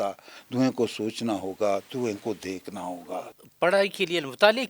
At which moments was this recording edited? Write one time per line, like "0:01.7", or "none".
0:03.0